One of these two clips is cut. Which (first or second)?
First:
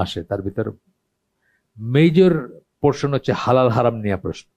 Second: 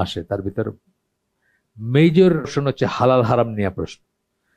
second